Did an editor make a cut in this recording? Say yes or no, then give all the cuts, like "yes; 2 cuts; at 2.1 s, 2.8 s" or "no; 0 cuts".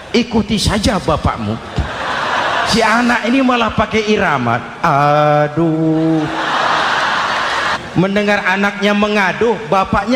yes; 2 cuts; at 2.7 s, 7.7 s